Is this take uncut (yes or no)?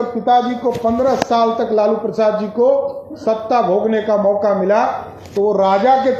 yes